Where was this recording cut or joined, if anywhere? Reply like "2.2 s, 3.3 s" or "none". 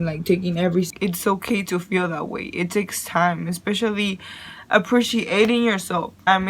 0.9 s